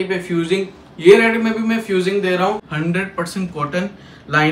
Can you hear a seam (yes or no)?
yes